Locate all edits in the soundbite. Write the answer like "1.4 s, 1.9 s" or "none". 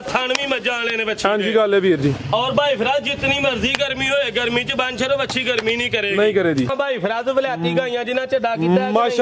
6.7 s